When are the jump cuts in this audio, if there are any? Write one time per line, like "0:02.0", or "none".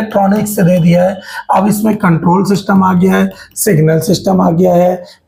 none

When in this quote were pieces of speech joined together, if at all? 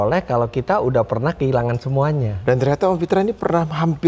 0:02.3

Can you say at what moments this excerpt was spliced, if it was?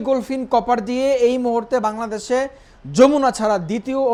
none

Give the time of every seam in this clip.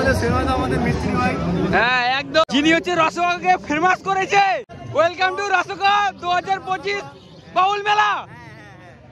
0:02.5
0:04.8

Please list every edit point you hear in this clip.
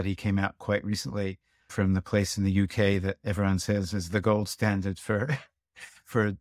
none

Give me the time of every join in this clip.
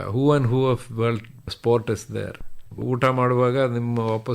0:02.8

